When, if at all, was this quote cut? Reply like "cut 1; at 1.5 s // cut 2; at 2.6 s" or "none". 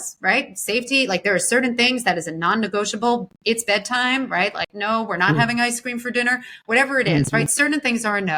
cut 1; at 3.3 s // cut 2; at 4.7 s